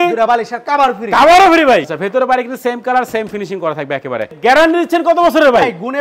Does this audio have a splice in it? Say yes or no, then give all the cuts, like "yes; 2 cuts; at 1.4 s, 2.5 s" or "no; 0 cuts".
yes; 2 cuts; at 1.9 s, 4.4 s